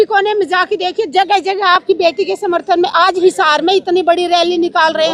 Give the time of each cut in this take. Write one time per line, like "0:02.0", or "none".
none